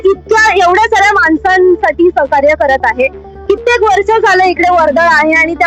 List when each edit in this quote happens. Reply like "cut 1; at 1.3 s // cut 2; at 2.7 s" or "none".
none